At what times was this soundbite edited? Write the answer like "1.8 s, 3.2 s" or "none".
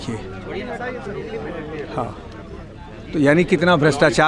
none